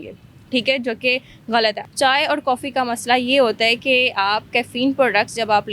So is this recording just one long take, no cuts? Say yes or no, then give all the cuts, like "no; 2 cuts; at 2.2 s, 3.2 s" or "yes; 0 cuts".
no; 1 cut; at 1.8 s